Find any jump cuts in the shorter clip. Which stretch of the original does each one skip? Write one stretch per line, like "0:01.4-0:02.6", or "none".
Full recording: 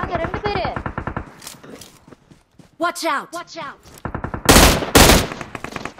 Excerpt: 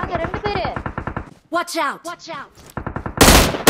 0:01.4-0:02.6